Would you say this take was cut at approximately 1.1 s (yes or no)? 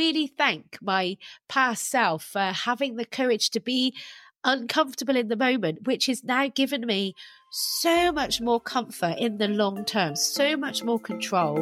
no